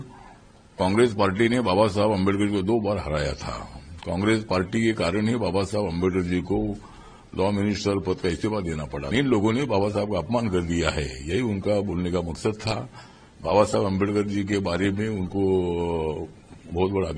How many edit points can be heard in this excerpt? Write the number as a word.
one